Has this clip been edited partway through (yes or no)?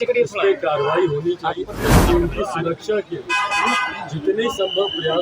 yes